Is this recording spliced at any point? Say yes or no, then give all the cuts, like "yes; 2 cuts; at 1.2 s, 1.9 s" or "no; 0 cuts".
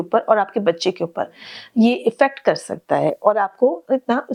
no; 0 cuts